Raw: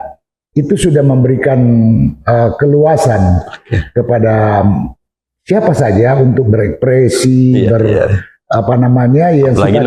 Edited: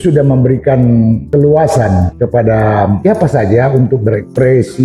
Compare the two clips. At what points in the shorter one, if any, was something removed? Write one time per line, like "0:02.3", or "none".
0:01.2
0:02.1
0:03.0